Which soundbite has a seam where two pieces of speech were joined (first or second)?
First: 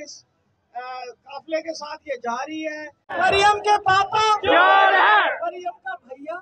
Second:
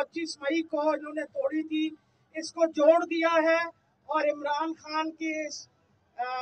first